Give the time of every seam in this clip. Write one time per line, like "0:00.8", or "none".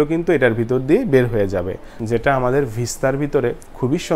0:01.9